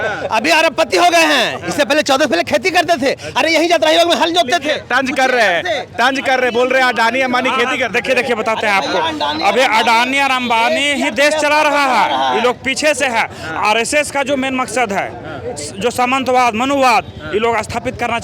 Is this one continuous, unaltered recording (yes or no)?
yes